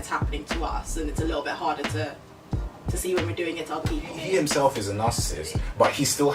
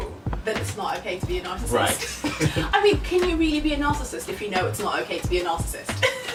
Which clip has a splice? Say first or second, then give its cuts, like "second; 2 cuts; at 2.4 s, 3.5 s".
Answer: first; 1 cut; at 4.2 s